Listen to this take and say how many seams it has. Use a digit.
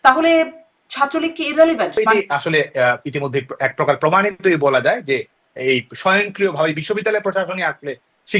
1